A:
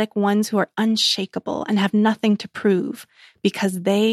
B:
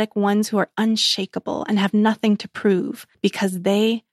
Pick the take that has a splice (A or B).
B